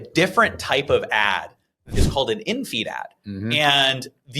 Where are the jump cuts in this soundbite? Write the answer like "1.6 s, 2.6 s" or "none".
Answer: 1.9 s

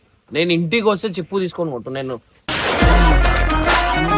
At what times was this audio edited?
none

